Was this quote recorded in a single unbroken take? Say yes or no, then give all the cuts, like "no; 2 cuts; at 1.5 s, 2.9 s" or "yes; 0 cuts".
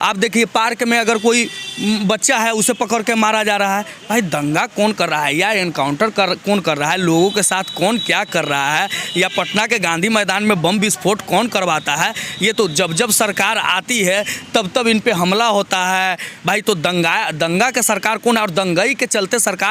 yes; 0 cuts